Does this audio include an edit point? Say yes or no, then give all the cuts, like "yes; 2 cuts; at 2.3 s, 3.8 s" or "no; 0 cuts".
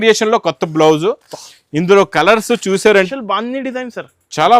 yes; 1 cut; at 3.1 s